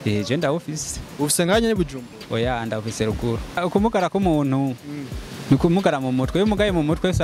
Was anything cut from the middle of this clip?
yes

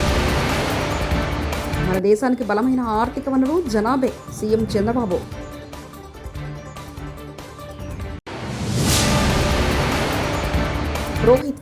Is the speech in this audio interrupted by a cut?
no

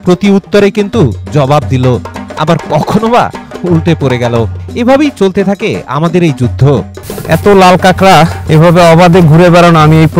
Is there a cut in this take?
yes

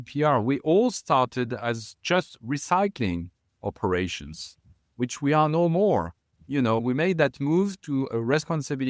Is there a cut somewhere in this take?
no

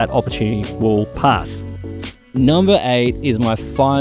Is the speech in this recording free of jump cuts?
yes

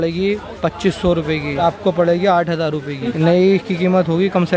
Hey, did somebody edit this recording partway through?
yes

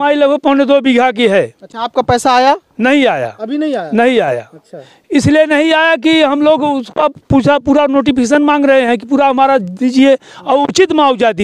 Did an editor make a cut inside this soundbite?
no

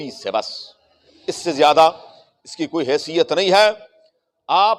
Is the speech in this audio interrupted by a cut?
no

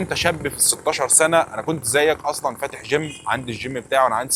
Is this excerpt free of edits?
yes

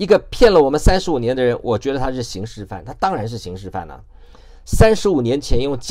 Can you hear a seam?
no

